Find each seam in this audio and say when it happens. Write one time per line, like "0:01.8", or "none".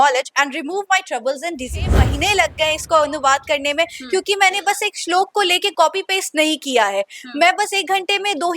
0:02.0